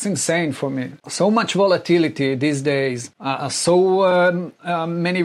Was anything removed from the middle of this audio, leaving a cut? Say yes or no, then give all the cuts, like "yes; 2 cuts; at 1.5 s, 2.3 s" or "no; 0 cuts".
yes; 2 cuts; at 1.0 s, 3.1 s